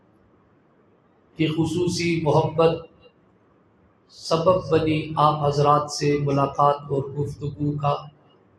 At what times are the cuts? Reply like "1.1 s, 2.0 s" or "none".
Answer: none